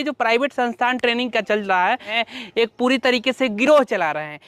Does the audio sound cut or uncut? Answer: cut